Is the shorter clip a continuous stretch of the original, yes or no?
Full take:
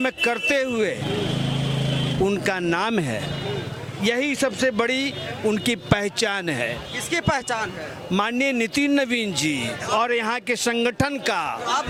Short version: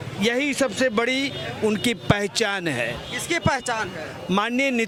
yes